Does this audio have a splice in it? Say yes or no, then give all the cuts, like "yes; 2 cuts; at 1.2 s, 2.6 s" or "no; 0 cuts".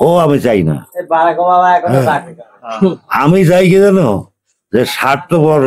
no; 0 cuts